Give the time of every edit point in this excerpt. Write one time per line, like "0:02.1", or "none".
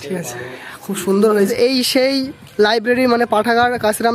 0:01.5